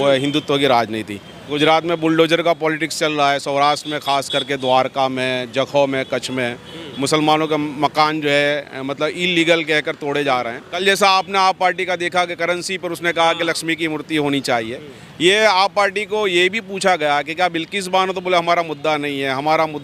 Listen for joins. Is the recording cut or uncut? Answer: cut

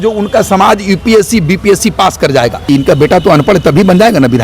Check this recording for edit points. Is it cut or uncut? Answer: cut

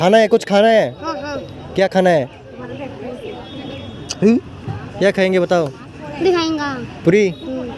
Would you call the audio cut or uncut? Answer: uncut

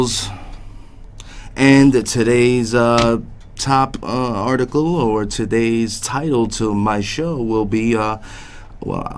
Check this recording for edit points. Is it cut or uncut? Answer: cut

